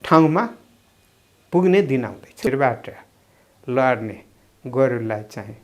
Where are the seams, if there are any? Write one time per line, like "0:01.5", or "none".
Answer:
0:02.5